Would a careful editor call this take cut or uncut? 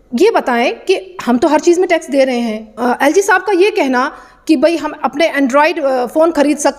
cut